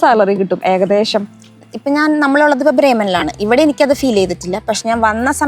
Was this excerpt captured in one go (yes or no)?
no